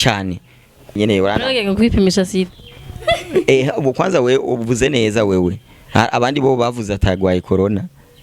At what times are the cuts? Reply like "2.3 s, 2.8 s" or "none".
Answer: 1.0 s

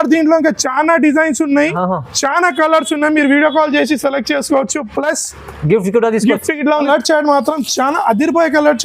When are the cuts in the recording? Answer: 6.8 s

